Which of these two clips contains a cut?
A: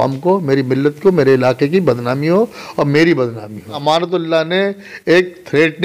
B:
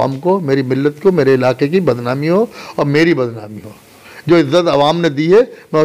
A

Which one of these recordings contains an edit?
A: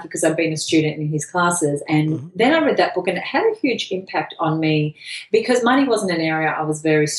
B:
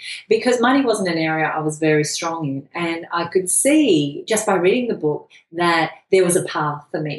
B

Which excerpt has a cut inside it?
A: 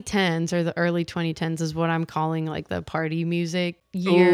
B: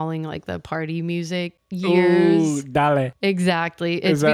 B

